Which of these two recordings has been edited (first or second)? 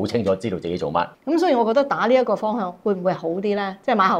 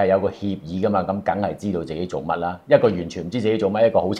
first